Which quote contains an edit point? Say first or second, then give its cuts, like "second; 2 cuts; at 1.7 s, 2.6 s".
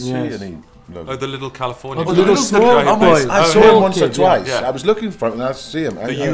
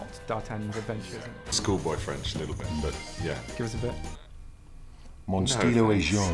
second; 1 cut; at 1.5 s